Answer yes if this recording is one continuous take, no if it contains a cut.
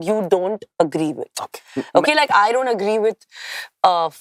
yes